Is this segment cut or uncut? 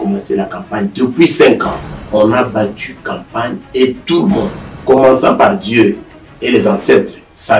cut